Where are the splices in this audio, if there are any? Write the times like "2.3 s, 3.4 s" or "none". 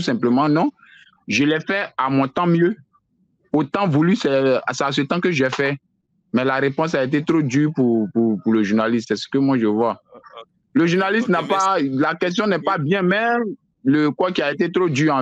none